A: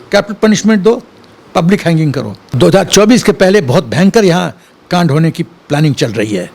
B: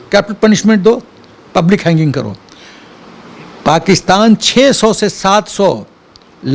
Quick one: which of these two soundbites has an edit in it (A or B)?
A